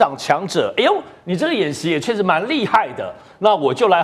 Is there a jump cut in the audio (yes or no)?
no